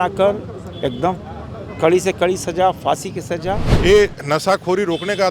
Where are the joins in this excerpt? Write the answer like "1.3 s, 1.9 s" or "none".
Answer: 3.7 s